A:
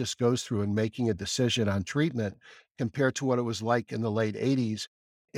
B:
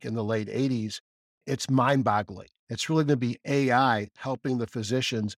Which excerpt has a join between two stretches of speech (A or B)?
B